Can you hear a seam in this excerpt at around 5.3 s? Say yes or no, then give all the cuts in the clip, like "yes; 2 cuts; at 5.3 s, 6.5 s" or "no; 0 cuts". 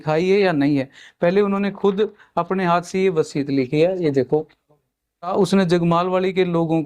yes; 1 cut; at 5.3 s